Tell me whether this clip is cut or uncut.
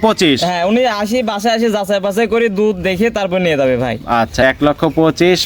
cut